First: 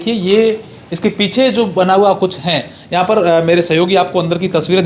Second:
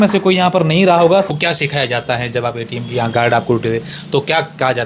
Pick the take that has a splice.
second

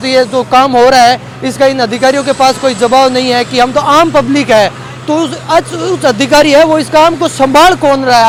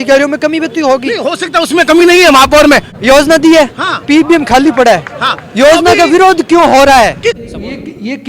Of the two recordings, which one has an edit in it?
second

